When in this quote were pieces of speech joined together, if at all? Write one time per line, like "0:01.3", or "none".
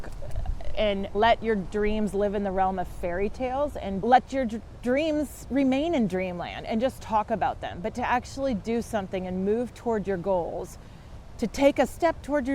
0:01.1